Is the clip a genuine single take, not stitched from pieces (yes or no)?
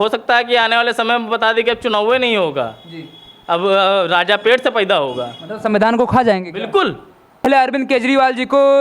no